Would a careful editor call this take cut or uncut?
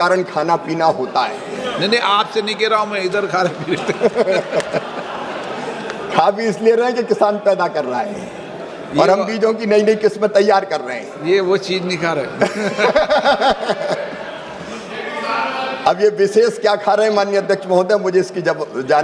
uncut